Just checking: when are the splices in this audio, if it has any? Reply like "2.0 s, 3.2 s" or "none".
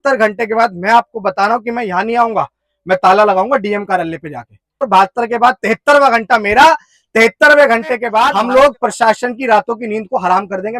4.9 s, 8.3 s